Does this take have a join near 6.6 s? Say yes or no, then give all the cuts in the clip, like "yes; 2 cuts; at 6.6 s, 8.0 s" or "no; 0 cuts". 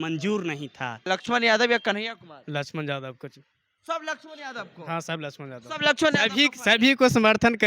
no; 1 cut; at 1.0 s